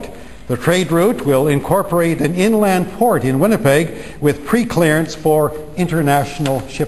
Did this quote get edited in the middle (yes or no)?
no